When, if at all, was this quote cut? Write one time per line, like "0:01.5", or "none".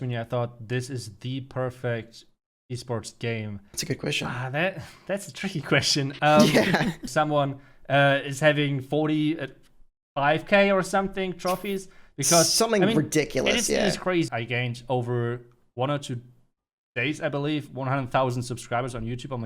0:03.7
0:07.0
0:14.3